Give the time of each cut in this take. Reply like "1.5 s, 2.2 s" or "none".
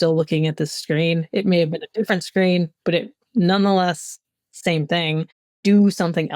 5.5 s